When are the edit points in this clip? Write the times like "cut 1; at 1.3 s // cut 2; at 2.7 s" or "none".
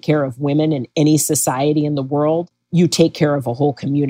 none